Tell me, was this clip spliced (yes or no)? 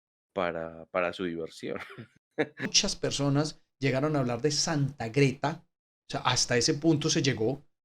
yes